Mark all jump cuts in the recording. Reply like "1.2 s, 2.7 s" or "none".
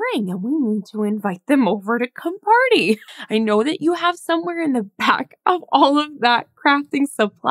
3.0 s